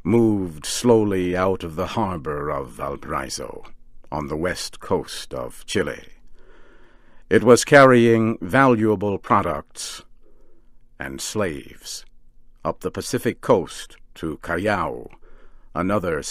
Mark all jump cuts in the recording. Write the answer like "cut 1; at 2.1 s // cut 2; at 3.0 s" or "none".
none